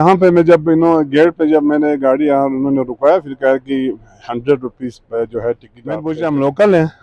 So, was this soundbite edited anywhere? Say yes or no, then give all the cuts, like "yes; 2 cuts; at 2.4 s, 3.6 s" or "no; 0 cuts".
yes; 1 cut; at 6.0 s